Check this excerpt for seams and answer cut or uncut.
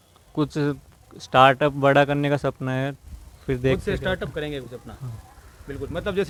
uncut